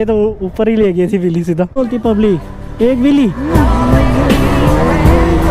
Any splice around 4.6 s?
no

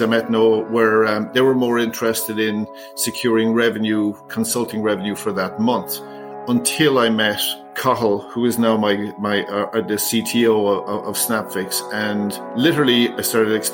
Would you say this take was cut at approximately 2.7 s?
no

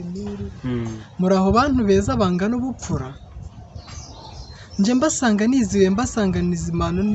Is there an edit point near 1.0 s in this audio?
yes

